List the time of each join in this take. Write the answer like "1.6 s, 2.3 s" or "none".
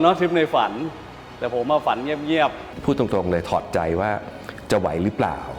2.6 s